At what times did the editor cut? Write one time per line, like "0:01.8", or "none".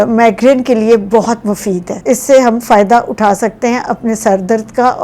0:01.9